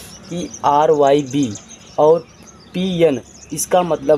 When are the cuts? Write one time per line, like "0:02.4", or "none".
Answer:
none